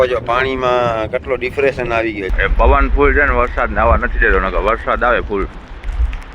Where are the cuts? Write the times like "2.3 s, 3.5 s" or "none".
2.3 s